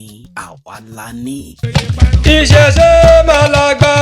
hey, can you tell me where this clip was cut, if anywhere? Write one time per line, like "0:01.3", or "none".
0:01.5